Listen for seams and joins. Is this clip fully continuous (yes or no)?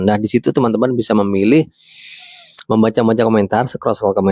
yes